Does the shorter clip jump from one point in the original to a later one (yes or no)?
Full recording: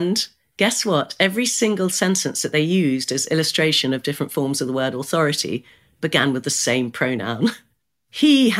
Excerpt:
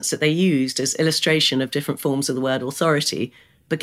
no